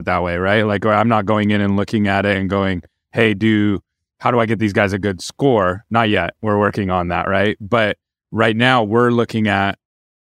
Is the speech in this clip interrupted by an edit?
no; 0 cuts

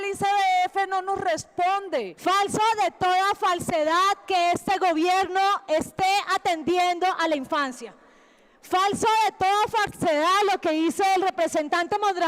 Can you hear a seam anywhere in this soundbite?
yes; 1 cut; at 2.1 s

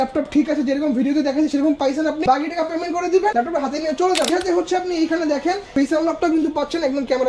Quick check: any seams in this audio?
yes; 4 cuts; at 2.2 s, 3.3 s, 4.3 s, 5.6 s

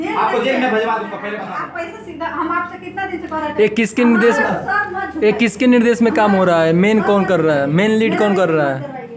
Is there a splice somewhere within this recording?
yes; 1 cut; at 1.4 s

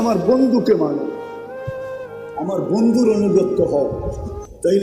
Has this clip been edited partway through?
yes; 2 cuts; at 1.1 s, 2.3 s

